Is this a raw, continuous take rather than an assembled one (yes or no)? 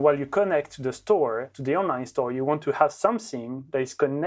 no